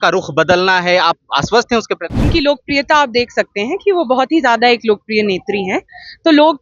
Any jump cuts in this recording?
yes; 1 cut; at 2.3 s

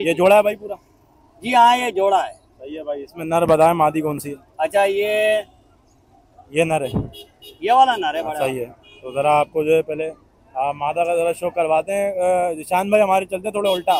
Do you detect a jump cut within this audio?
no; 0 cuts

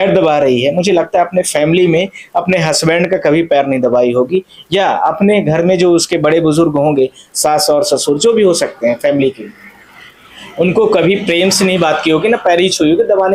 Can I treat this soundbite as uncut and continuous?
yes; 0 cuts

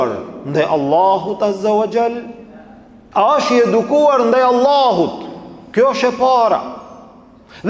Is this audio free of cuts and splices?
yes; 0 cuts

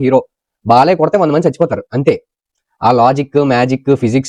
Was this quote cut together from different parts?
no; 0 cuts

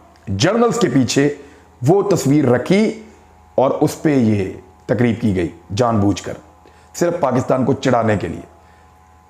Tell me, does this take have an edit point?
no; 0 cuts

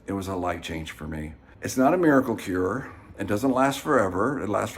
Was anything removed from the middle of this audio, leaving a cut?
yes; 1 cut; at 1.4 s

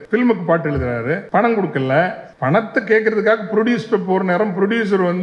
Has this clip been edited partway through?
yes; 2 cuts; at 1.2 s, 2.3 s

